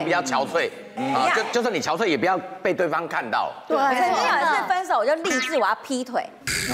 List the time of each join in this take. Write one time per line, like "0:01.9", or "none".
none